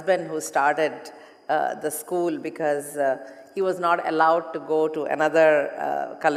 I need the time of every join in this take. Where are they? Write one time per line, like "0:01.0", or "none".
none